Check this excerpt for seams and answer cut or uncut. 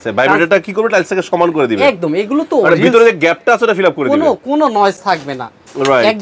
uncut